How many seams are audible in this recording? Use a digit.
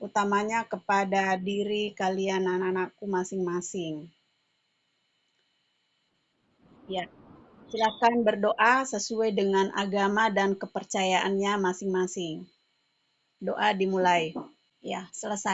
1